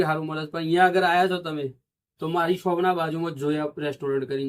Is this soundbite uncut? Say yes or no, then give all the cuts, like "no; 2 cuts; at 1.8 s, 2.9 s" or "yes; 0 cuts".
yes; 0 cuts